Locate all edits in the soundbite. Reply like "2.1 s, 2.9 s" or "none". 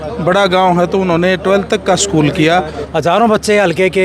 2.8 s